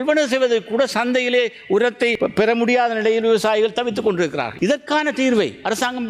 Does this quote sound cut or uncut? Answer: cut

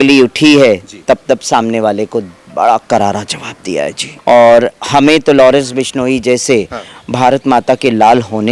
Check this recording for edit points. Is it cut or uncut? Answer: cut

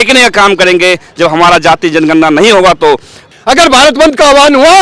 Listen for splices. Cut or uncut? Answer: cut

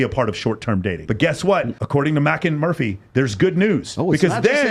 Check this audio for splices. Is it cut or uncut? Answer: uncut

